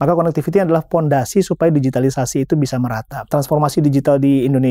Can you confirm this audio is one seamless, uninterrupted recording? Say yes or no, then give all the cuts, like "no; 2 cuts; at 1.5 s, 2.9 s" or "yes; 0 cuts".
no; 1 cut; at 3.3 s